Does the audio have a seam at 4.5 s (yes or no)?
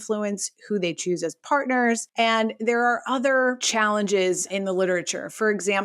yes